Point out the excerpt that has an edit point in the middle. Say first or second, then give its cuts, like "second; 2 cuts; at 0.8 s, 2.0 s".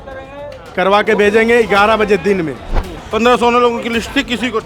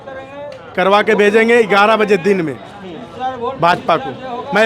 first; 1 cut; at 3.0 s